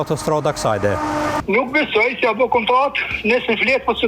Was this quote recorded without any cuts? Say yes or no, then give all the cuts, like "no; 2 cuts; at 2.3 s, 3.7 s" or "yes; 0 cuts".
no; 1 cut; at 1.4 s